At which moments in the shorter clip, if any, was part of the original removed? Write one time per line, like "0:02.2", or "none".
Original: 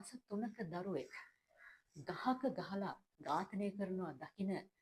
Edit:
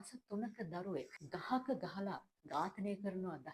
0:01.2